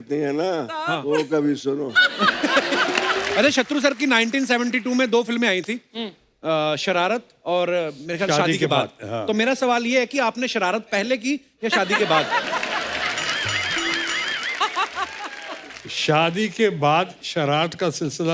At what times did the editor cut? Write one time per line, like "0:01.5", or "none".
0:03.3